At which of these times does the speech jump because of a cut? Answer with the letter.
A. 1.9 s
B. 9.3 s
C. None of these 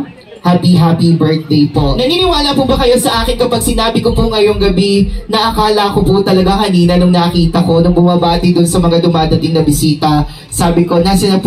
A